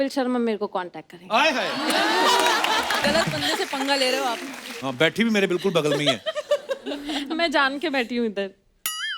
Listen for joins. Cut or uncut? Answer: cut